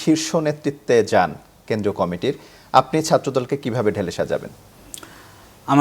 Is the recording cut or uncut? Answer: uncut